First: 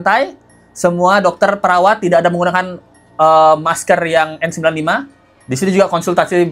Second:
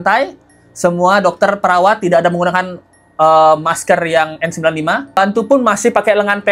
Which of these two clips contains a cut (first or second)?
second